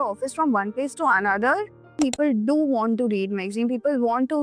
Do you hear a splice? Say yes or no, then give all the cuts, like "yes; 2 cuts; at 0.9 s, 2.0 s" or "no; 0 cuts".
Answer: yes; 1 cut; at 2.0 s